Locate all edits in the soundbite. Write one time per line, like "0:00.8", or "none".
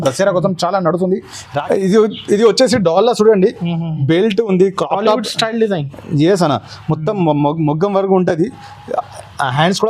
0:01.5